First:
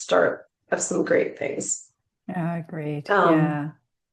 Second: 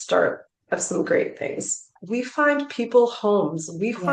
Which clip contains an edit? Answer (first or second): second